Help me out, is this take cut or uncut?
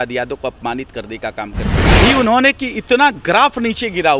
cut